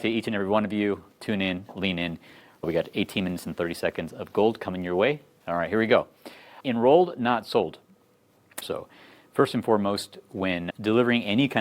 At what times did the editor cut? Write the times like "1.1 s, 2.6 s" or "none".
8.6 s